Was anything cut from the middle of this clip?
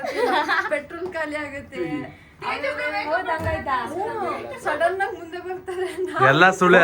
no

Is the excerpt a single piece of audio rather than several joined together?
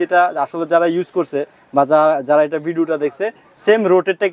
yes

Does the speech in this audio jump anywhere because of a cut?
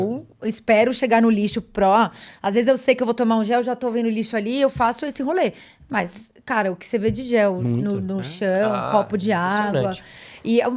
no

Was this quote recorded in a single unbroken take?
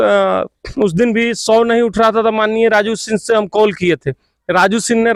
yes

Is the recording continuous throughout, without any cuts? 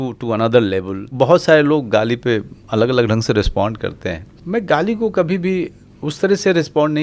no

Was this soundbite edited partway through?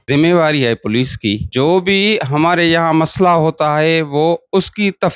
yes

